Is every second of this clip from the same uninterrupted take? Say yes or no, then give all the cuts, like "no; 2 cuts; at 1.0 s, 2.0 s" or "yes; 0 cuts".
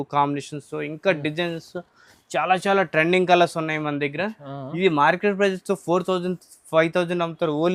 yes; 0 cuts